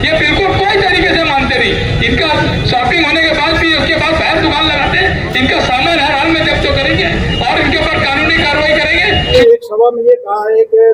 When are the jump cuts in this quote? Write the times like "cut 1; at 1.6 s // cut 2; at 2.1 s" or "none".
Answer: cut 1; at 9.3 s